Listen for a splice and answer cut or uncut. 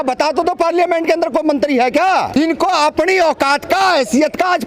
cut